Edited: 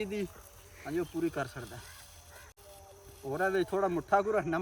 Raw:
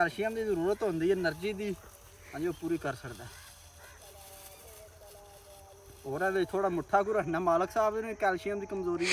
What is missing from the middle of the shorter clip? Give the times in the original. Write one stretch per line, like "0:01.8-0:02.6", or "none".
0:04.0-0:05.4